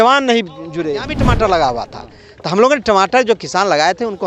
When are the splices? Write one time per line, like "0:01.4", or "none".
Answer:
0:01.2